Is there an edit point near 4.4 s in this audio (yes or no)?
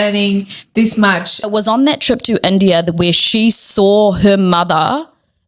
no